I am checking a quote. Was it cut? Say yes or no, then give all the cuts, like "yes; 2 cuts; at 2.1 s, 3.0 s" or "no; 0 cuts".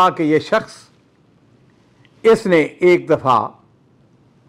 no; 0 cuts